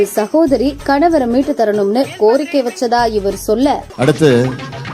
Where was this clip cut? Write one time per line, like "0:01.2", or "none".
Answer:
0:03.9